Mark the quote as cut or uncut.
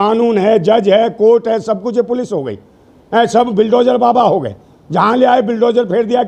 uncut